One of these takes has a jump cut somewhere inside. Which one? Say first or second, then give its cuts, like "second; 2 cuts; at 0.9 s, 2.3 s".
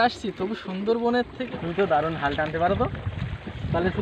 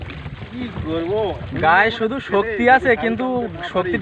first; 1 cut; at 1.4 s